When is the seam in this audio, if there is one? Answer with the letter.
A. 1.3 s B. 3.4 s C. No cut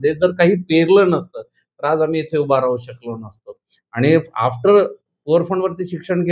C